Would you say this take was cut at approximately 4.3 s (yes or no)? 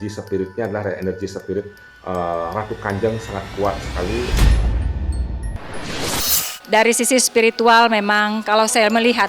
yes